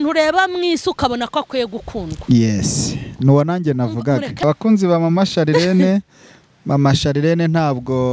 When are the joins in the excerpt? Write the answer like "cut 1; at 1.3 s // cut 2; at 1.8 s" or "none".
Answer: cut 1; at 4.4 s